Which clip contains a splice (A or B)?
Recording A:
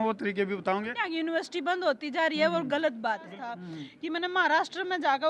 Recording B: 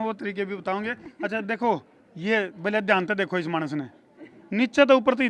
A